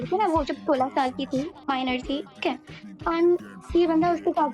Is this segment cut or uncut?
cut